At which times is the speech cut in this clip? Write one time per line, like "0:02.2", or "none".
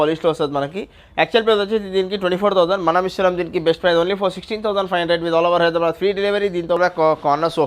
0:06.7